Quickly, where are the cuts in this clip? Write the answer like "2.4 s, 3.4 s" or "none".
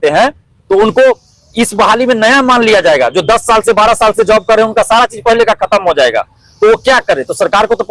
none